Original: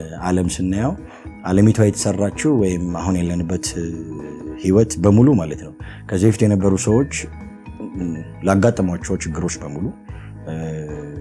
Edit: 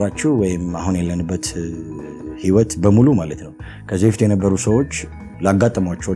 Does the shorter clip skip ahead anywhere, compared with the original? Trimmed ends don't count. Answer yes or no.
yes